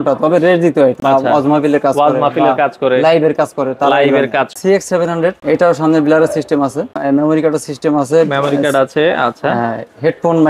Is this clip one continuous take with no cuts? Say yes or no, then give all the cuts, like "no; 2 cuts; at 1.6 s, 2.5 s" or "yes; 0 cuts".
no; 4 cuts; at 1.0 s, 4.5 s, 5.4 s, 7.0 s